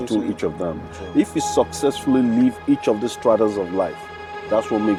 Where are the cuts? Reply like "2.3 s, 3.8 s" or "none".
none